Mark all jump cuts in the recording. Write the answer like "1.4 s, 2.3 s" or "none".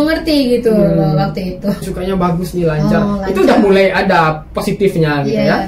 1.8 s